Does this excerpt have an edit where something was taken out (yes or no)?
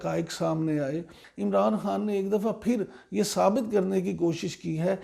yes